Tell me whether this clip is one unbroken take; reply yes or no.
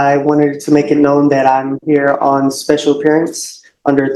yes